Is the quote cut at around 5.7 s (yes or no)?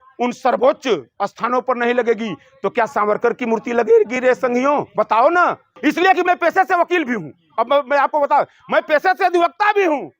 yes